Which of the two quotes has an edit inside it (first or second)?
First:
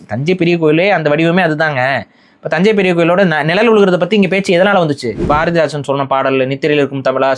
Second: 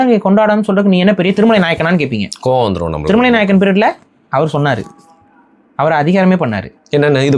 first